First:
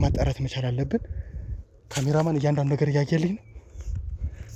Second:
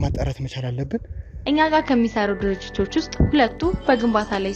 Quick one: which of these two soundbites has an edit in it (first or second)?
second